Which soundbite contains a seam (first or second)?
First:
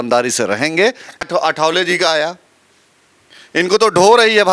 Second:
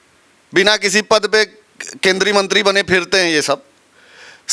first